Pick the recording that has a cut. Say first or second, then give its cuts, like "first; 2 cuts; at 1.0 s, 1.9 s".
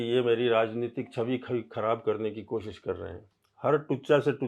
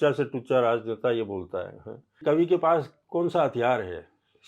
second; 1 cut; at 2.2 s